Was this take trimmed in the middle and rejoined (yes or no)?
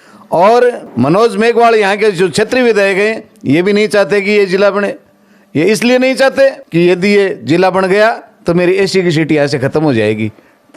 yes